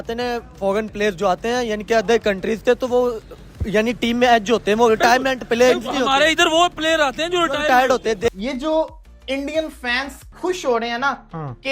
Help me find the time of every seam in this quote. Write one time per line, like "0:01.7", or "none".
0:08.3

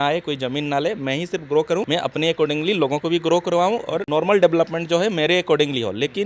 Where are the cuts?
0:01.9
0:04.0

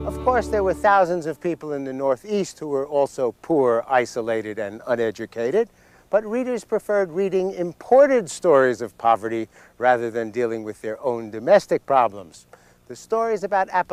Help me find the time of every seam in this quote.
none

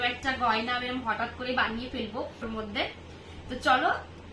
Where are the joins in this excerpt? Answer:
0:02.5

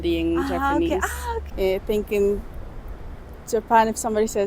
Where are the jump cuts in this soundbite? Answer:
0:01.4

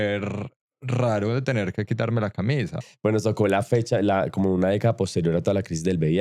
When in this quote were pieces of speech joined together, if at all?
0:02.8

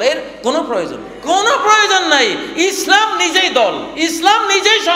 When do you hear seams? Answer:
0:01.1
0:03.9

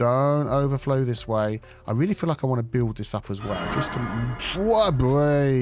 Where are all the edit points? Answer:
none

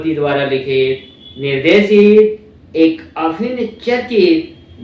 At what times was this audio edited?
none

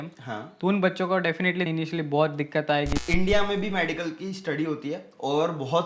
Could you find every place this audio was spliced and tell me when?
0:01.7
0:03.0

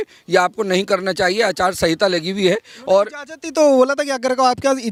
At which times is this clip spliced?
none

